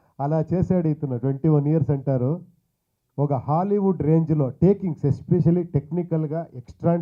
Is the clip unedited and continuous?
yes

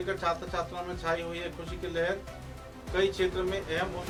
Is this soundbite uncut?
yes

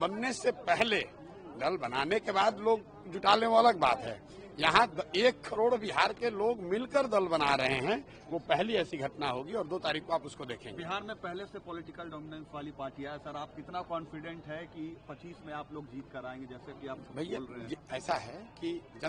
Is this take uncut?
yes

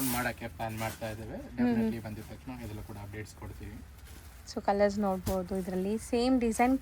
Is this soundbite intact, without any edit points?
yes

